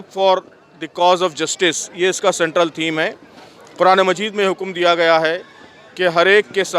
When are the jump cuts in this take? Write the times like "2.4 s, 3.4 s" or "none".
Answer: none